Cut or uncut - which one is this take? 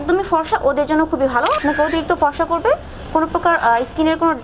cut